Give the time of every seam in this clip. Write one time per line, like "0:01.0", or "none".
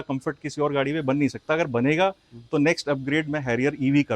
none